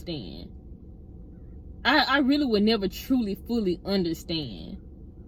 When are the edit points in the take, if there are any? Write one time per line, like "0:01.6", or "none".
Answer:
none